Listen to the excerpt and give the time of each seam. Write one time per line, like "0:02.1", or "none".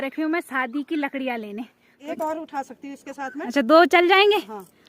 0:01.9